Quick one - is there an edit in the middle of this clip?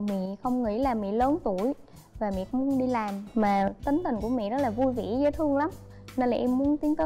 yes; 1 cut; at 5.9 s

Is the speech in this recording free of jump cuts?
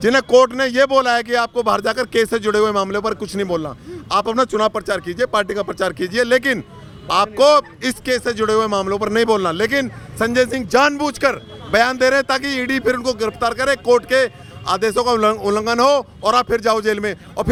yes; 0 cuts

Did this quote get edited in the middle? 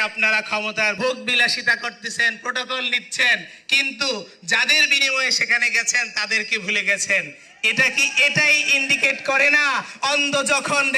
yes; 1 cut; at 1.0 s

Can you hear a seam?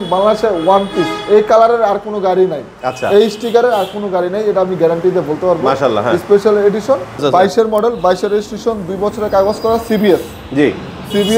yes; 1 cut; at 7.2 s

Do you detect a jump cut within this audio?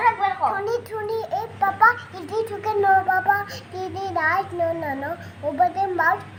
no; 0 cuts

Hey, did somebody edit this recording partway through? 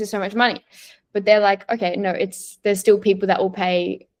no; 0 cuts

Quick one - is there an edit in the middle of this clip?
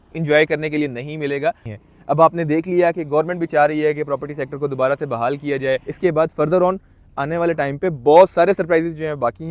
yes; 2 cuts; at 1.7 s, 5.9 s

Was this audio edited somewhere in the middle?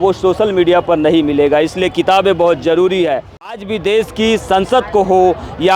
yes; 1 cut; at 3.6 s

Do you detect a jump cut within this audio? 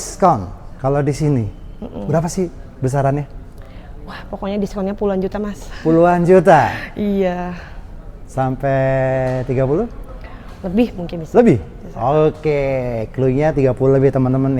no; 0 cuts

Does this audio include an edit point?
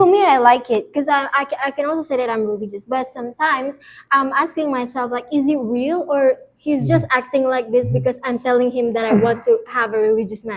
no; 0 cuts

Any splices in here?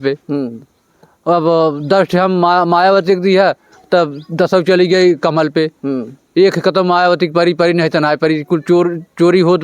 no; 0 cuts

